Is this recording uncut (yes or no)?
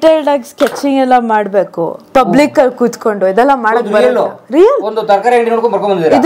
yes